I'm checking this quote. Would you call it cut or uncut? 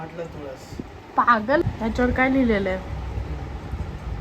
cut